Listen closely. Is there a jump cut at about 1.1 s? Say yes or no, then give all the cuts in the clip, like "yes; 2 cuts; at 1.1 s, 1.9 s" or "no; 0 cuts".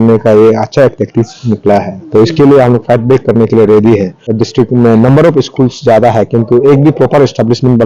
no; 1 cut; at 4.2 s